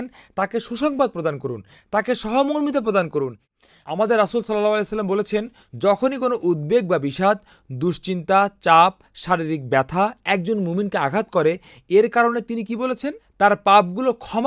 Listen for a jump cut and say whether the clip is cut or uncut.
cut